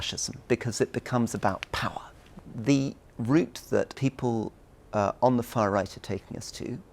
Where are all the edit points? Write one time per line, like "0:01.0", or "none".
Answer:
0:02.3
0:03.9

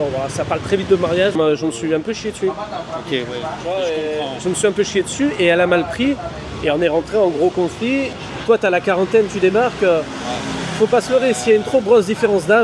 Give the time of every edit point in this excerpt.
0:01.4
0:08.1

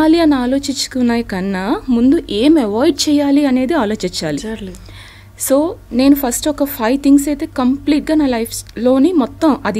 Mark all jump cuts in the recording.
none

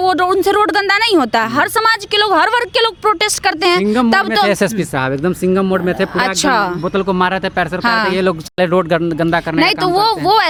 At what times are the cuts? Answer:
none

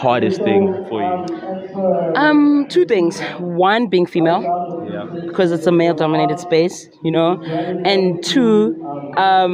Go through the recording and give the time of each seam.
none

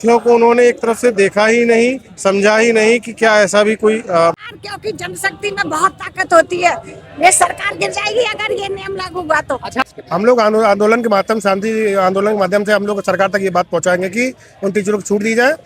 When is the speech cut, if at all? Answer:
0:04.3
0:09.8

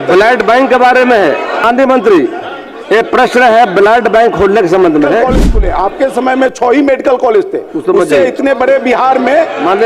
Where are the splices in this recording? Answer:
0:01.6
0:05.4

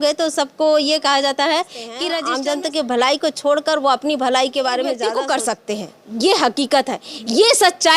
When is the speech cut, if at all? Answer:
0:02.1
0:05.0

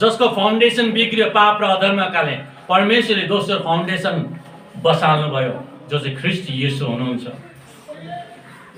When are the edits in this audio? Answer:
none

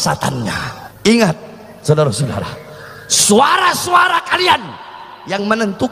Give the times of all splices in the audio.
0:00.9

